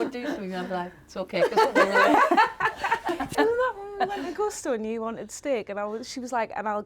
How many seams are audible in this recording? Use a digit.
1